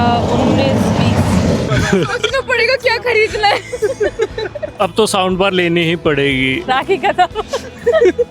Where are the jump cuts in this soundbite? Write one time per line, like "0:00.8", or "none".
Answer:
0:01.7
0:06.6